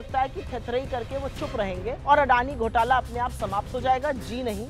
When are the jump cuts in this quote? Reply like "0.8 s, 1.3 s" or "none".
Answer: 2.0 s